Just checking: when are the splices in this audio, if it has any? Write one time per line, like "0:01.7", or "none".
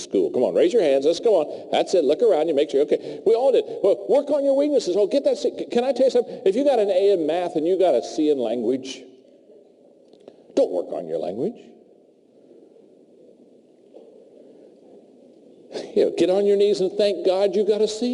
0:15.0